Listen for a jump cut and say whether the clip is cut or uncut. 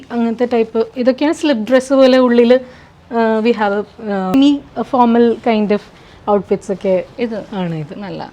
cut